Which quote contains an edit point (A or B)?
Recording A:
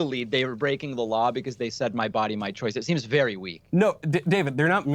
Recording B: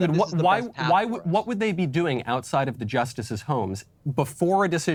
A